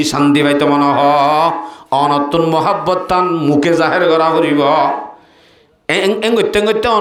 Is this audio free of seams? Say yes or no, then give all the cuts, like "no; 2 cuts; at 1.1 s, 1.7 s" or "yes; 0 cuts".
yes; 0 cuts